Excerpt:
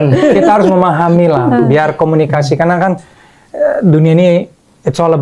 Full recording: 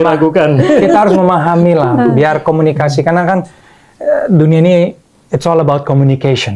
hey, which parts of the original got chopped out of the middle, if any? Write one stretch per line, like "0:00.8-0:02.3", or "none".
none